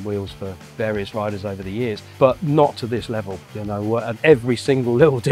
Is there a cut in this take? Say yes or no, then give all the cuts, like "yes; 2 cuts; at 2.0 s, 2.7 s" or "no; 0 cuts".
yes; 2 cuts; at 2.1 s, 4.1 s